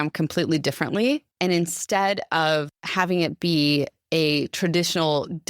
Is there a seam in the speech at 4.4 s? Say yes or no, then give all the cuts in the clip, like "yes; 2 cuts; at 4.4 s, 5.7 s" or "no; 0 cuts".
no; 2 cuts; at 1.3 s, 2.8 s